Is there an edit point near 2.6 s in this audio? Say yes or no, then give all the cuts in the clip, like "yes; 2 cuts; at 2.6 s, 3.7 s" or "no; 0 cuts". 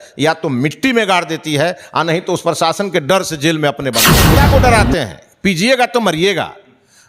no; 1 cut; at 4.3 s